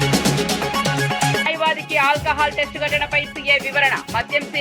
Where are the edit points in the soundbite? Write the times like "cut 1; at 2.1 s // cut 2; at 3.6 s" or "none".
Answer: none

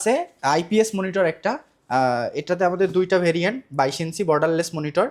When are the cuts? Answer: none

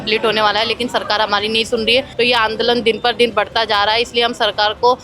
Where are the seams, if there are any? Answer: cut 1; at 2.1 s

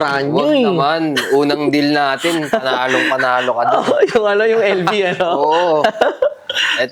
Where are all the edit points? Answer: none

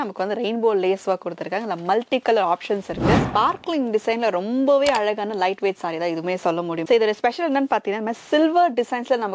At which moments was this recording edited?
cut 1; at 3.2 s // cut 2; at 6.8 s

